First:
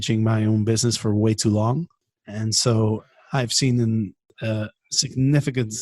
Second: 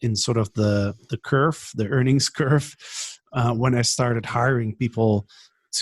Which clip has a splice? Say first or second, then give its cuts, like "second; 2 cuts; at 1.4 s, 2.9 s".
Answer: first; 2 cuts; at 2.0 s, 4.3 s